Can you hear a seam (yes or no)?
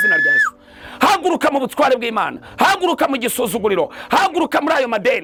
no